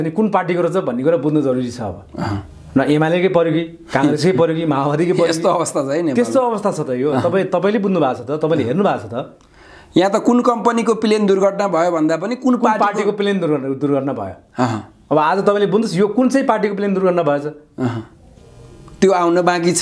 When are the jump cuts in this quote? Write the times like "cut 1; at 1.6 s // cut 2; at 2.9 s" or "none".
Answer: none